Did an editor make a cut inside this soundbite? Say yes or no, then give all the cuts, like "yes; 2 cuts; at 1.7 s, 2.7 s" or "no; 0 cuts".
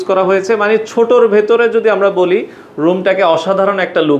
no; 0 cuts